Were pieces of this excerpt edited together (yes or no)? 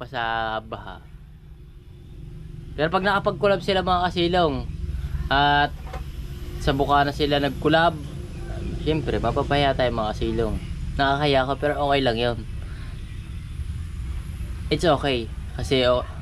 no